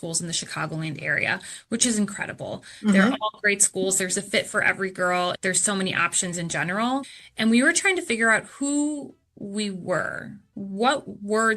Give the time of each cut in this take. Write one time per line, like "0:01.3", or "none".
0:05.4
0:07.1